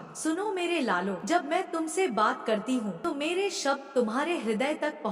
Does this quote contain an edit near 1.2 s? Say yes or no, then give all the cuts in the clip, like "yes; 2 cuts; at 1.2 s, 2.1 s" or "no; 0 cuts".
yes; 2 cuts; at 1.2 s, 3.0 s